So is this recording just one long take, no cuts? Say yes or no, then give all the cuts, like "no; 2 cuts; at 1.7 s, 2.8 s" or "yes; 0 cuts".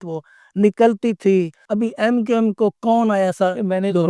no; 1 cut; at 1.6 s